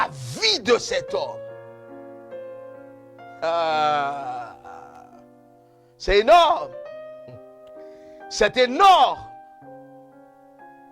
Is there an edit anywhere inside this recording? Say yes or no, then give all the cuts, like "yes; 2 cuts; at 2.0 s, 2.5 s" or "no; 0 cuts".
yes; 1 cut; at 9.7 s